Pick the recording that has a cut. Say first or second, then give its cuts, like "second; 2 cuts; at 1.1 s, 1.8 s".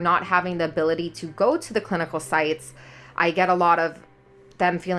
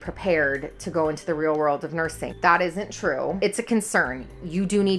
second; 2 cuts; at 2.3 s, 3.4 s